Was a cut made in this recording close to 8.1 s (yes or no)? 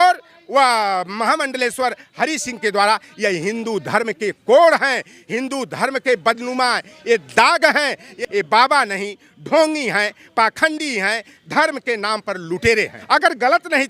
yes